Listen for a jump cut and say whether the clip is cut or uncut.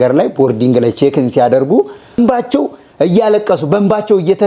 cut